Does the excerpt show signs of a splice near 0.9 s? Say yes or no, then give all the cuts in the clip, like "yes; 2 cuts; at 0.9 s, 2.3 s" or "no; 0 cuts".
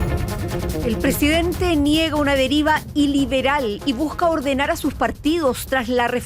yes; 1 cut; at 0.9 s